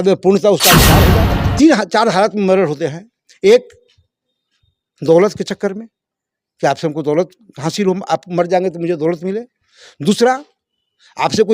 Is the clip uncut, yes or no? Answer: no